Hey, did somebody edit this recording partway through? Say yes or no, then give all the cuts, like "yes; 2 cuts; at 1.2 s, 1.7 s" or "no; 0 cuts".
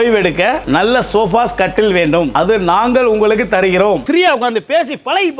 yes; 1 cut; at 4.0 s